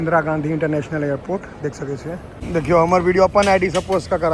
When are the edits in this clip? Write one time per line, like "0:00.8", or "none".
0:02.4